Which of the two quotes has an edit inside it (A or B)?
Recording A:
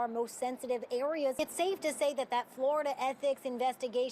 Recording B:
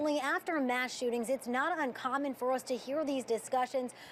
A